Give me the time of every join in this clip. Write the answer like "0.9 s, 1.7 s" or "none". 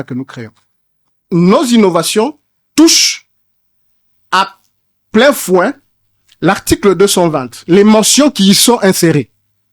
1.1 s